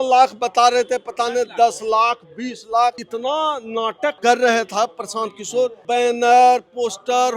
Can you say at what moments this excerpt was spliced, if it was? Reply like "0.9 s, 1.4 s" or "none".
3.0 s, 4.2 s, 5.8 s